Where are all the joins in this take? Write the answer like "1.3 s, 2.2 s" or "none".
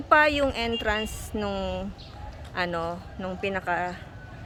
none